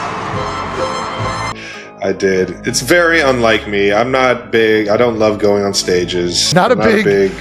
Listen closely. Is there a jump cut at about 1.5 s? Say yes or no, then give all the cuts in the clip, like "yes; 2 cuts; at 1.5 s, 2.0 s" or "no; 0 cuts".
yes; 2 cuts; at 1.5 s, 6.5 s